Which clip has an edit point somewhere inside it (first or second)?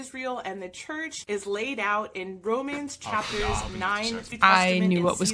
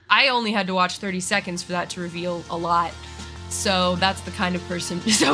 first